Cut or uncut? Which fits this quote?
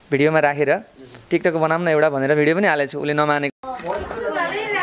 cut